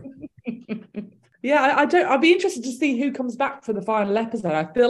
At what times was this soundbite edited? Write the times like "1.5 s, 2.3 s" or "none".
none